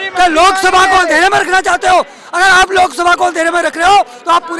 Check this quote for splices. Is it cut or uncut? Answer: uncut